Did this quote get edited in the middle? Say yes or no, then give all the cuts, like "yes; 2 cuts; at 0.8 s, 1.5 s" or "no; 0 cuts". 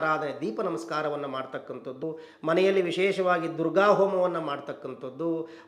yes; 1 cut; at 2.0 s